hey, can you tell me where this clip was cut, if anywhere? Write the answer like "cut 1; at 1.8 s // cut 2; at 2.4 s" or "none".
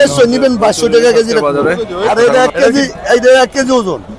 cut 1; at 1.9 s